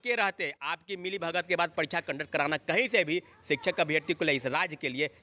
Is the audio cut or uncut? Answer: uncut